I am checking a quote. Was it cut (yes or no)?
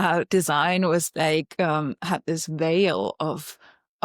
no